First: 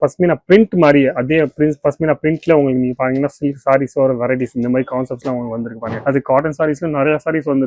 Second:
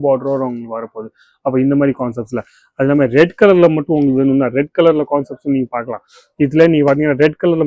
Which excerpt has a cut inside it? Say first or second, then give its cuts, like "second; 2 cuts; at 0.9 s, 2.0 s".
first; 1 cut; at 5.9 s